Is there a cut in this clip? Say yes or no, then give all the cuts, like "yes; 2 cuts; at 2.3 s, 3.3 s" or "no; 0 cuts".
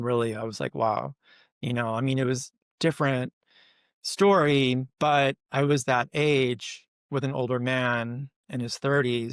no; 0 cuts